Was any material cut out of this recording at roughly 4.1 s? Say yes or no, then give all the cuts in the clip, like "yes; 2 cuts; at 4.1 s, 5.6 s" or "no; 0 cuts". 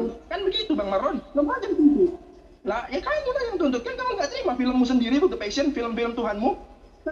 yes; 1 cut; at 4.1 s